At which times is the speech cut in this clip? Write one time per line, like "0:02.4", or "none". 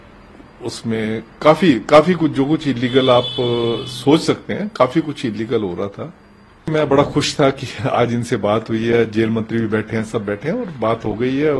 0:06.7